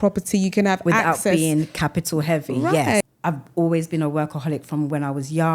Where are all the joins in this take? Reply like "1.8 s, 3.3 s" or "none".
3.0 s